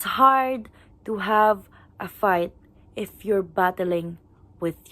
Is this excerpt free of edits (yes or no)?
yes